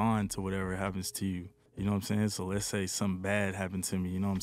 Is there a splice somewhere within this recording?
no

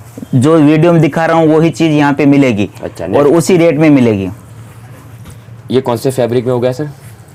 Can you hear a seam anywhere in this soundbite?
no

